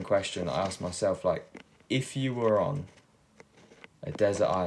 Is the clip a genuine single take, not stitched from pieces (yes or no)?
yes